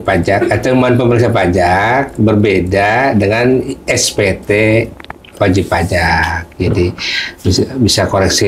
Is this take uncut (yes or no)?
yes